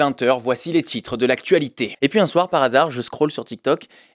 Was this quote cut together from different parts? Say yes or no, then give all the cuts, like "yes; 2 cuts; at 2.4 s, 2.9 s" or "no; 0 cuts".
yes; 1 cut; at 1.9 s